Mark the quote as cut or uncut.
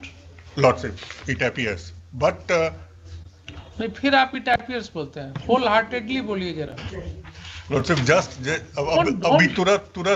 uncut